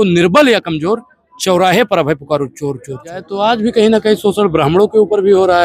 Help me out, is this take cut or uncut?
cut